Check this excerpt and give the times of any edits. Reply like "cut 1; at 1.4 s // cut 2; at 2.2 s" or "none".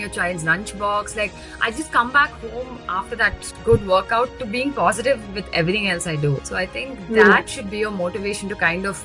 none